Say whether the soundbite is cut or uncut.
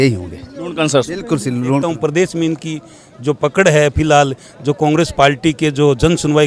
cut